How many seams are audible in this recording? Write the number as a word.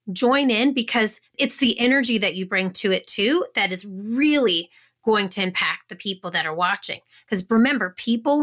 one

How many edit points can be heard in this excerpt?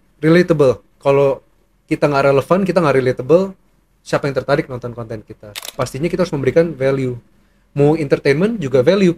one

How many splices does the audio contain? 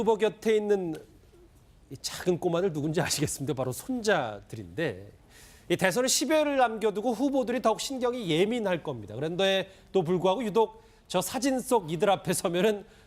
zero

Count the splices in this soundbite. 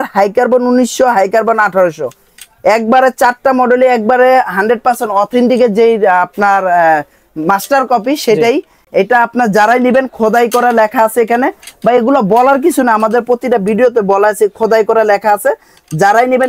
zero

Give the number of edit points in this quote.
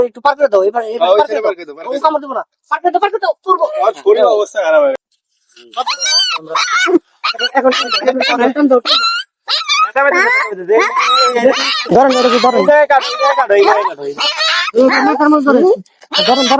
one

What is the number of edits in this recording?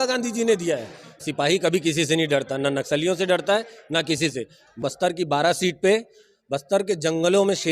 two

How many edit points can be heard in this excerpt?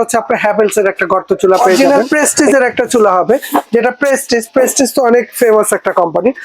one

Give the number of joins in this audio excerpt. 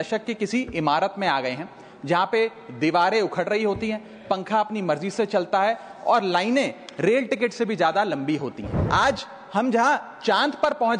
one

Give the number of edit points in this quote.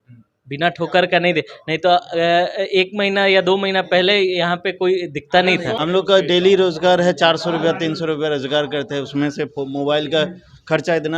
one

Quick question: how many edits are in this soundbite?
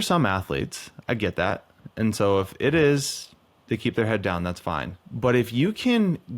one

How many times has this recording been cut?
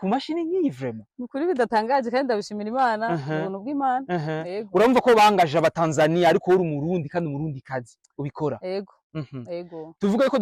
zero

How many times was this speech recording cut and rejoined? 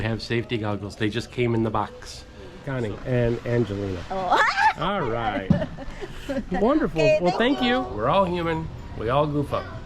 two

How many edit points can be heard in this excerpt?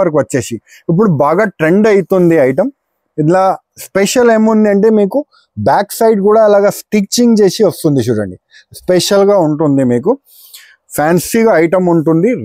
zero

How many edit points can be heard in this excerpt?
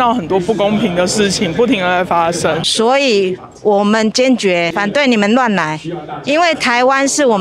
two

